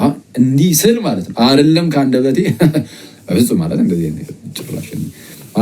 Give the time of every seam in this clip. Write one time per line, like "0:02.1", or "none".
none